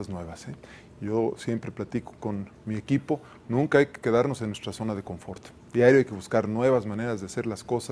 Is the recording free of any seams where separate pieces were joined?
yes; 0 cuts

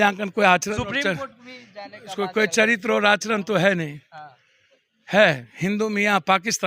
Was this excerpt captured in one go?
yes; 0 cuts

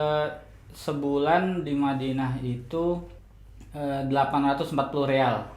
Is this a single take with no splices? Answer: yes; 0 cuts

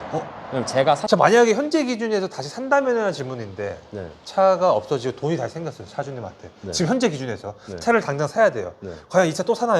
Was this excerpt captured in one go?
no; 1 cut; at 1.0 s

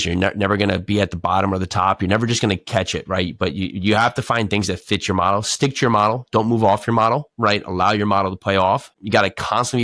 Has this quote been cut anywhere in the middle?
no; 0 cuts

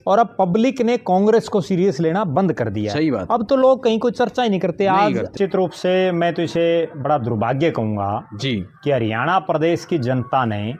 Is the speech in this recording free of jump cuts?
no; 1 cut; at 5.3 s

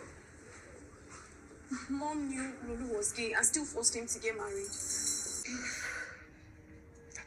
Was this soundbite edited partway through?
yes; 1 cut; at 5.4 s

